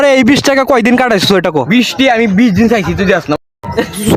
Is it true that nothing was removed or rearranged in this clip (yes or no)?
yes